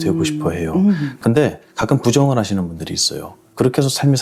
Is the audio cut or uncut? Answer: uncut